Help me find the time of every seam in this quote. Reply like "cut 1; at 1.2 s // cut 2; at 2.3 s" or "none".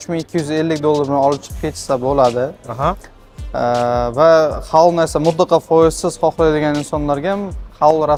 none